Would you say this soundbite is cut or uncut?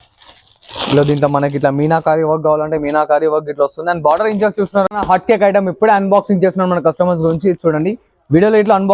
cut